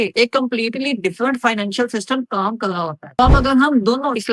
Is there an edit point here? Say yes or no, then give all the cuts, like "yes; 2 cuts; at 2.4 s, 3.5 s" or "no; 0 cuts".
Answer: yes; 1 cut; at 3.2 s